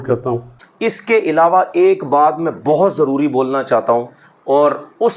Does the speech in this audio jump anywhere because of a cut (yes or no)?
no